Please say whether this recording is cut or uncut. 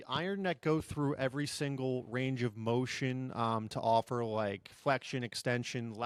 uncut